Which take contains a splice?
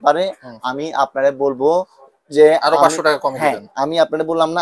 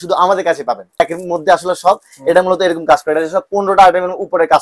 second; 1 cut; at 1.0 s

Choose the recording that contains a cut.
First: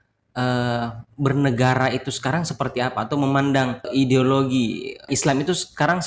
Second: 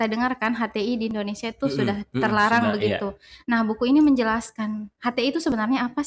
first; 2 cuts; at 3.9 s, 5.1 s

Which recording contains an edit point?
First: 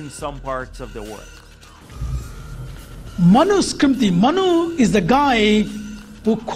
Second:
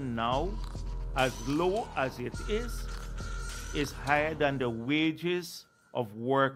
first; 1 cut; at 1.8 s

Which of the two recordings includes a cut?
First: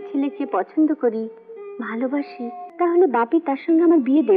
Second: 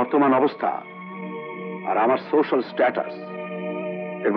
first; 1 cut; at 2.6 s

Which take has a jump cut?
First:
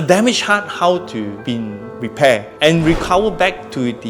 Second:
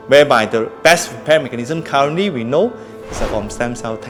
first; 1 cut; at 1.6 s

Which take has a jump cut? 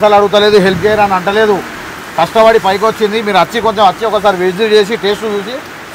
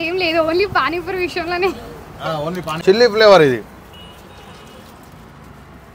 second; 1 cut; at 2.8 s

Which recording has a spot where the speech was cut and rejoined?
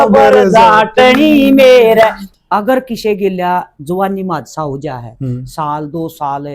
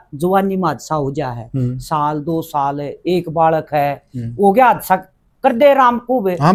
first; 1 cut; at 2.2 s

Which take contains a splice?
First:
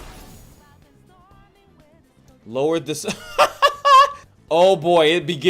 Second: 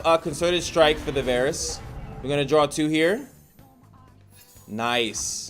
first; 1 cut; at 4.3 s

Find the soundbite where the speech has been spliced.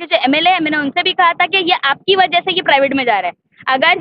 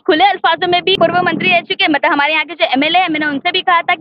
second; 1 cut; at 1.0 s

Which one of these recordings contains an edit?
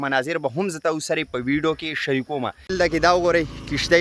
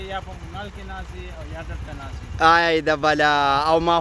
first; 1 cut; at 2.6 s

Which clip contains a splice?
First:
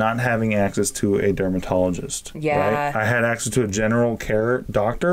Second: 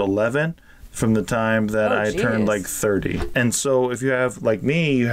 second; 1 cut; at 3.2 s

